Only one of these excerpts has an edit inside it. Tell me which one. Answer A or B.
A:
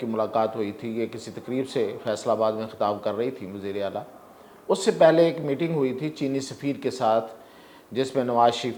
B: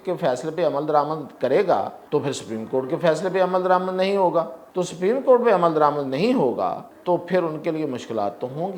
B